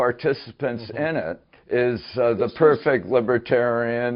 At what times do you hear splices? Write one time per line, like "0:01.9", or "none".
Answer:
0:01.5